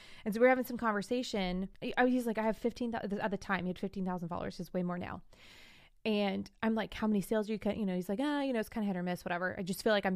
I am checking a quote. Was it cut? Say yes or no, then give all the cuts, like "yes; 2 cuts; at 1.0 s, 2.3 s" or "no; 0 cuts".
yes; 1 cut; at 1.7 s